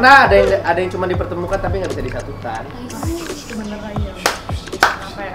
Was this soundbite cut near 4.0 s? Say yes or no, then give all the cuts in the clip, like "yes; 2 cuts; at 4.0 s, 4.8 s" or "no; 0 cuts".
no; 0 cuts